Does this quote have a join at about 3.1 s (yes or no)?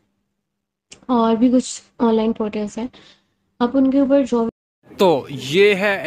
no